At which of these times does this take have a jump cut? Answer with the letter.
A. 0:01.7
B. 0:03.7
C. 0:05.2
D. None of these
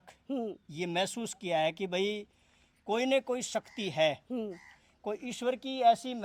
D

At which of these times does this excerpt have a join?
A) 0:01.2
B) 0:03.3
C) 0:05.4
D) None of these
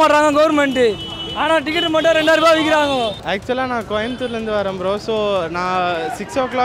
B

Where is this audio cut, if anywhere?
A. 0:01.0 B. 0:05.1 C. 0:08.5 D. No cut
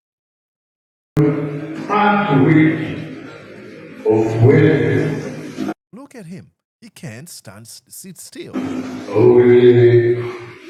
D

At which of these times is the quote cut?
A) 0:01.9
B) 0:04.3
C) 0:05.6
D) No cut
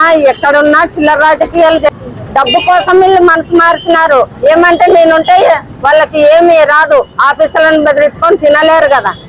A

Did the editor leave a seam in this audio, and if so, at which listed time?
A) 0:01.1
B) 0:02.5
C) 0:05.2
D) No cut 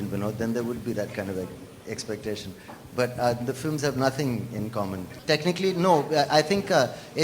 D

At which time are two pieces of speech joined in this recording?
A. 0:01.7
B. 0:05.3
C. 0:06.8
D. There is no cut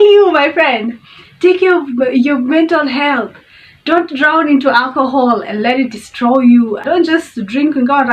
C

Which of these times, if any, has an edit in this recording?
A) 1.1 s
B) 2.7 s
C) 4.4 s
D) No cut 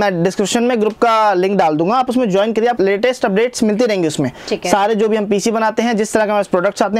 B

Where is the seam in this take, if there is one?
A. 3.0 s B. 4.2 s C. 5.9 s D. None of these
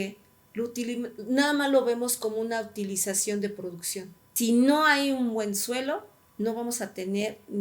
B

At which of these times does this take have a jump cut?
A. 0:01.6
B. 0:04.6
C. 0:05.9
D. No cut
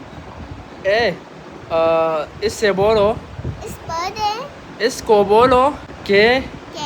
C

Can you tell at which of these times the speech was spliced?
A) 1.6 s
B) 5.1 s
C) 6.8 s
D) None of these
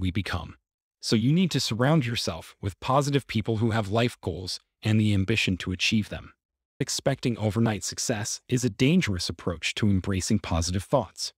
C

